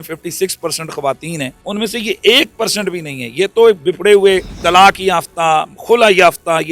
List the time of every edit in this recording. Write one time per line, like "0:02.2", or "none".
0:01.6
0:04.5